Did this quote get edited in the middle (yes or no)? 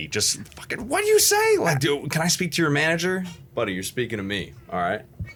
no